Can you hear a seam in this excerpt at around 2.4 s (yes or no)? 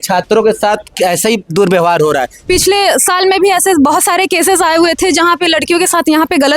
yes